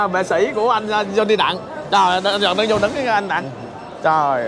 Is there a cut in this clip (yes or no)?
no